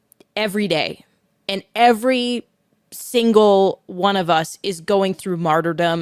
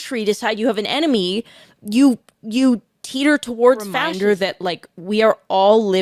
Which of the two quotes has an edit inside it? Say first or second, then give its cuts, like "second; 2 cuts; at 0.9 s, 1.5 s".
second; 1 cut; at 4.1 s